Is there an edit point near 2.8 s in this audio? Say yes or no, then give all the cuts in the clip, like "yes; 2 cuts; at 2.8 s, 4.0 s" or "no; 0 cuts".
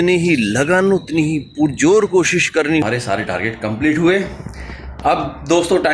yes; 1 cut; at 2.8 s